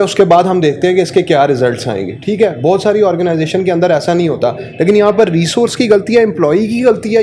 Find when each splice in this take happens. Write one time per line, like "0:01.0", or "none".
none